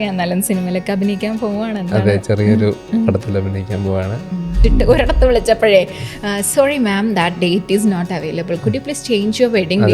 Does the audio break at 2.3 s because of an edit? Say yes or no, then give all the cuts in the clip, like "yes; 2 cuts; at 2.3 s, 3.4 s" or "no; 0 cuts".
no; 1 cut; at 4.7 s